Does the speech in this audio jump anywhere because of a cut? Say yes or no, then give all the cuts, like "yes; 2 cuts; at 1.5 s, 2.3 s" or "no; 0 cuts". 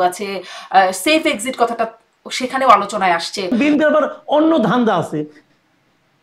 yes; 1 cut; at 3.5 s